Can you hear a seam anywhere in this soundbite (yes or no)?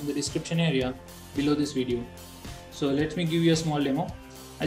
yes